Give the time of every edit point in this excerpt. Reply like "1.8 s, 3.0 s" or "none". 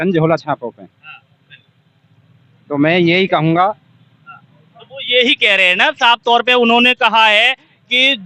none